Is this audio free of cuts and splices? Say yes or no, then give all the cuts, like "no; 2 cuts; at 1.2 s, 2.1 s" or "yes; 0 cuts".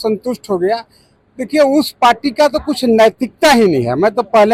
yes; 0 cuts